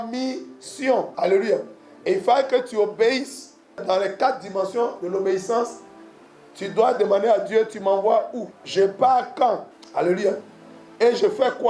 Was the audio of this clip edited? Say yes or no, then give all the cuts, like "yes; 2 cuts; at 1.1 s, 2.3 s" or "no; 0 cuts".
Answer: yes; 4 cuts; at 1.1 s, 3.8 s, 8.5 s, 9.8 s